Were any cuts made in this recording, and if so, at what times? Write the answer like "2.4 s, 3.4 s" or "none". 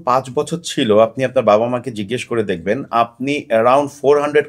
none